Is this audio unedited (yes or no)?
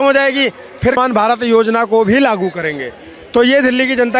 no